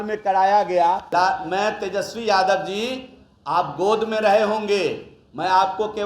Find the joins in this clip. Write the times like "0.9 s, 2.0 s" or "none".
1.0 s